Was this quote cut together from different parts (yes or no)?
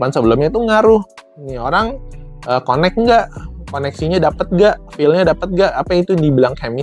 no